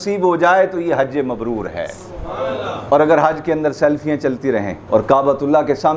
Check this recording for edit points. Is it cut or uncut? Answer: cut